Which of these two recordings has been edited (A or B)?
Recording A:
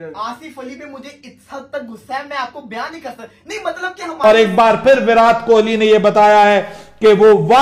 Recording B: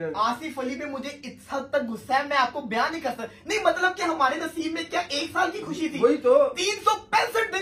A